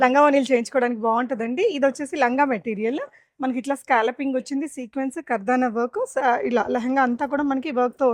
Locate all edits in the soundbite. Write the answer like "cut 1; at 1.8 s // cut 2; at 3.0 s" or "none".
none